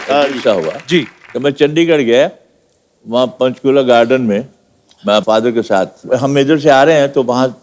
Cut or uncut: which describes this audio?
cut